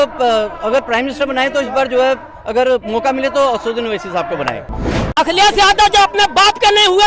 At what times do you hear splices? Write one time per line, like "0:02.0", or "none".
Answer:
0:04.7

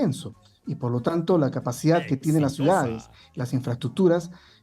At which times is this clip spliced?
none

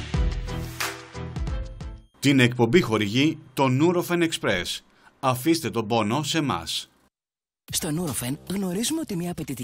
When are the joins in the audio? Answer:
0:01.0
0:01.7

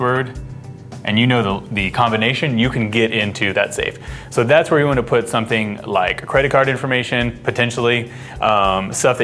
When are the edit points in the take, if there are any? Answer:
0:07.0

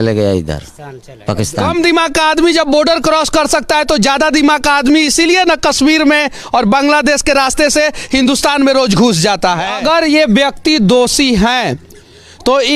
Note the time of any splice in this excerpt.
0:01.6
0:09.8

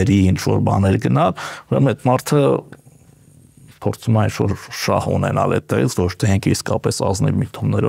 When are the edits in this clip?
none

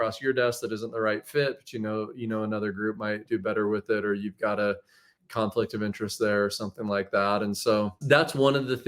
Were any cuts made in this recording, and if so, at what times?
0:03.2
0:08.0

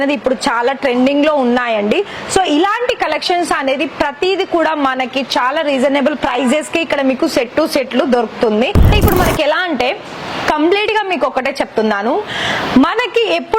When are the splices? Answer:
0:08.8

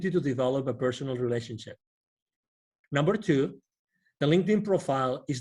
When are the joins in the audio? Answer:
0:02.7

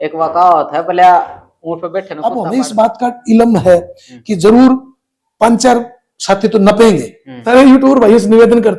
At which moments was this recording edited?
0:02.1
0:07.5

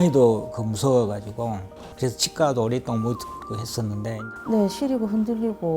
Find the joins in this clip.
0:04.2

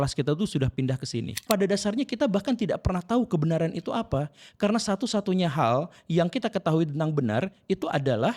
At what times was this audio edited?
0:01.4

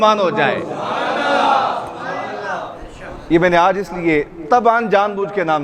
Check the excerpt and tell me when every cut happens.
none

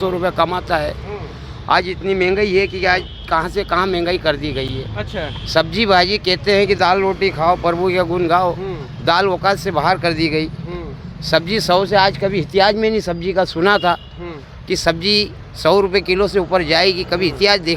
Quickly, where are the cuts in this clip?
none

